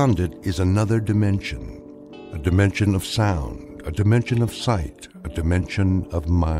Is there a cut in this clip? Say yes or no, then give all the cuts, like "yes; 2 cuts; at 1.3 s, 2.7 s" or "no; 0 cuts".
no; 0 cuts